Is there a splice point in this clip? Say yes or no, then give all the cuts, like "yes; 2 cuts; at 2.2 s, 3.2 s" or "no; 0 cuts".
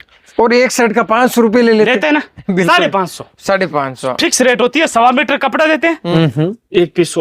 yes; 1 cut; at 6.0 s